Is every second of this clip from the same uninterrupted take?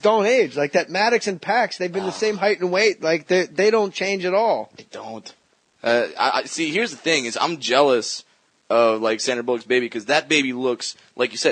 yes; 0 cuts

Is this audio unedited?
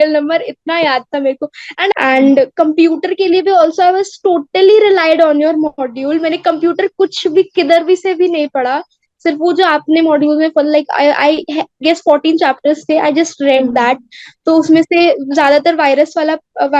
no; 1 cut; at 1.9 s

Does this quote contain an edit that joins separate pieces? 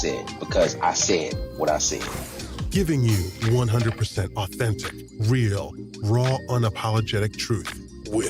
yes; 1 cut; at 2.2 s

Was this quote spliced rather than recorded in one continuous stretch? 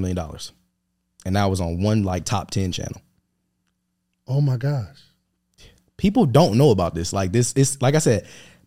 yes; 1 cut; at 2.5 s

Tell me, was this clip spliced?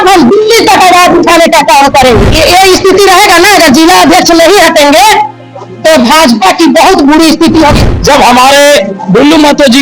yes; 2 cuts; at 2.3 s, 7.8 s

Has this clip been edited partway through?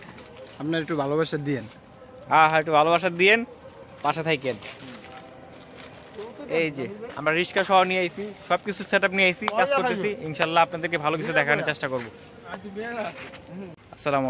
no; 0 cuts

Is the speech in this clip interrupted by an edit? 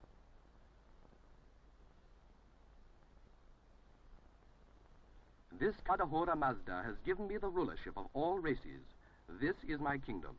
no; 0 cuts

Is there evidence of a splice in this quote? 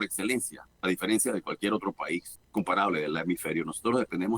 yes; 1 cut; at 2.4 s

